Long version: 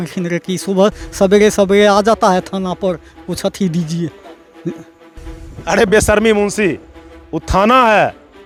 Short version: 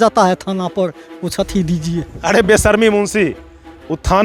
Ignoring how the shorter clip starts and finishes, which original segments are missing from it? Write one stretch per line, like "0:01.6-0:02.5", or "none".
0:04.2-0:05.6